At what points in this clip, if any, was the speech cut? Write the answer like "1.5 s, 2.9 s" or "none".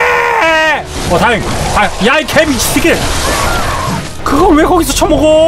4.1 s